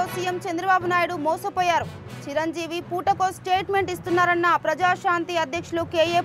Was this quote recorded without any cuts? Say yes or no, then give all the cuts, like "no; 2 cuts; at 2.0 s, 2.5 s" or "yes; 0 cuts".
yes; 0 cuts